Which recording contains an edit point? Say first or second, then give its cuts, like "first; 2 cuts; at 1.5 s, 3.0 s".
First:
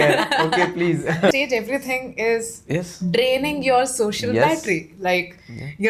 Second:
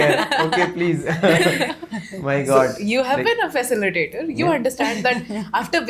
first; 1 cut; at 1.3 s